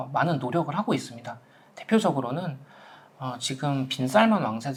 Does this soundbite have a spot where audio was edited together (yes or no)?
no